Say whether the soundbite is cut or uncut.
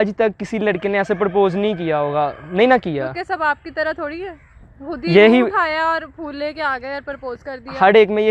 uncut